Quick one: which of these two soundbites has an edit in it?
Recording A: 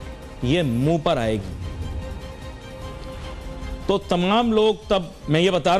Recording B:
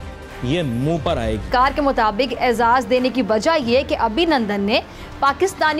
B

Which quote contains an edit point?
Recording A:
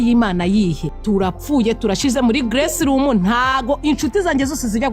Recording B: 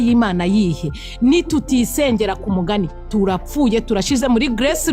A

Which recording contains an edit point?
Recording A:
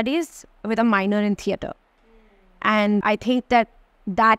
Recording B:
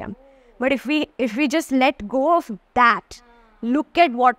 A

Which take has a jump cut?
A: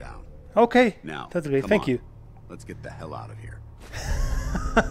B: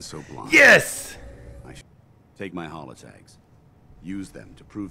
B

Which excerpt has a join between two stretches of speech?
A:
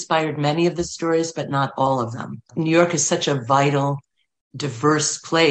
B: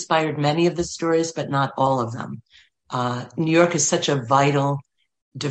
A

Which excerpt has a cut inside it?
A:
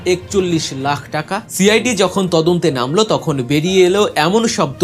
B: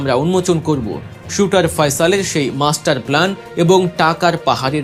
A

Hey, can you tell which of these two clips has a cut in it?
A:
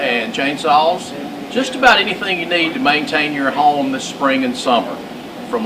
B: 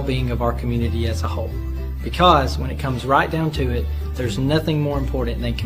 B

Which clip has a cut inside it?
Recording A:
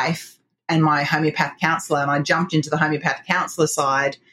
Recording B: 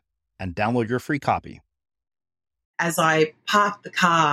B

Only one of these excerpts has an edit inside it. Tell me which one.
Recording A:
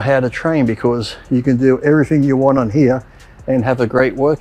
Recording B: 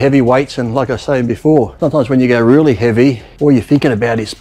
B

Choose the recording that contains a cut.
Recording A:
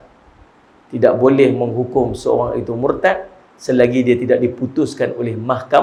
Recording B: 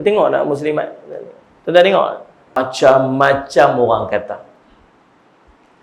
B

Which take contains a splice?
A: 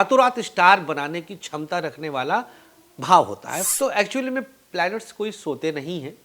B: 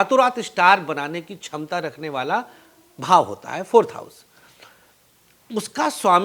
A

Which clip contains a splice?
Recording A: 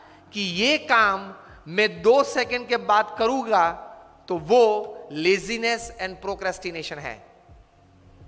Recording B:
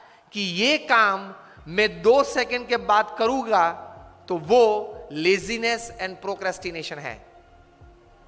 A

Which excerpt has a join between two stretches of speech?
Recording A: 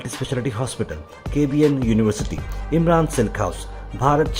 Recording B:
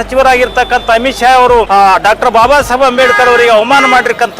B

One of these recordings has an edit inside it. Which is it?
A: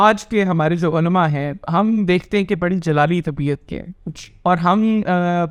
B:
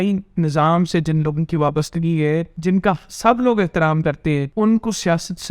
B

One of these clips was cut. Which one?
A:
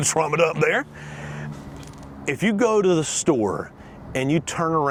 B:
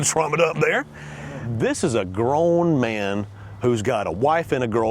B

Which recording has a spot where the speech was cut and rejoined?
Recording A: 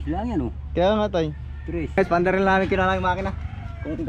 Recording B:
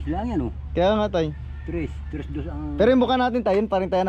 A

